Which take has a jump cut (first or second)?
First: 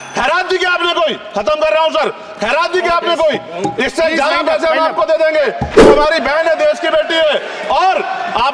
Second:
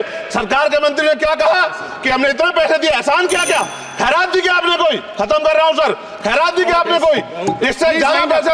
first